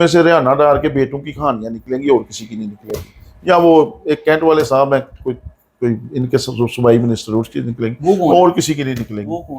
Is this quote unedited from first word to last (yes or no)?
yes